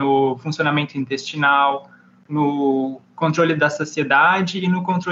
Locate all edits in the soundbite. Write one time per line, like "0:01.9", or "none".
none